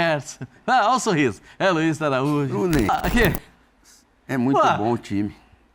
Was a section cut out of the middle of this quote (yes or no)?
yes